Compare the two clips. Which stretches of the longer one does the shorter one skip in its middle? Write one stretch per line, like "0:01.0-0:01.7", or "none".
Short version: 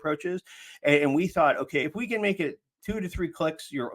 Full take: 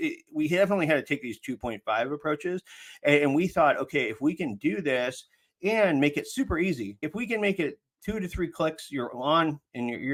0:04.0-0:07.0